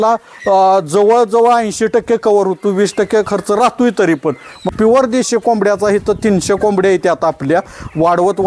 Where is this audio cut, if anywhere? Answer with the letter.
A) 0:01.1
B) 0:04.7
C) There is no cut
B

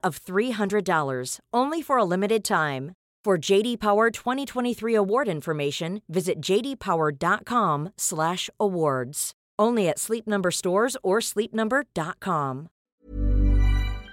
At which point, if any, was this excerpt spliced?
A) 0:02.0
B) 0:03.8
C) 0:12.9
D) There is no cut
C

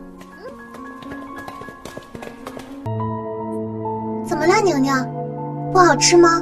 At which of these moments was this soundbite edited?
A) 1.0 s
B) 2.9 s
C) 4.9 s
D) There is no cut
B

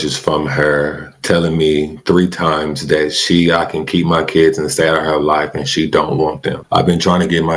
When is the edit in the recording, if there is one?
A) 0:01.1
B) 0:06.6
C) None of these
B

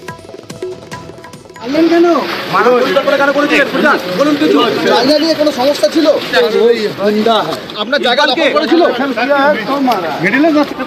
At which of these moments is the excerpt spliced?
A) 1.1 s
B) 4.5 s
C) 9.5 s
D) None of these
A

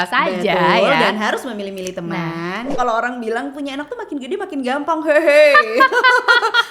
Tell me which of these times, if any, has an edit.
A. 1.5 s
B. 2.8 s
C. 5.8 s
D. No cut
B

